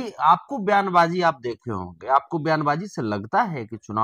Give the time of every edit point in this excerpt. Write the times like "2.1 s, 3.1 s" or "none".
none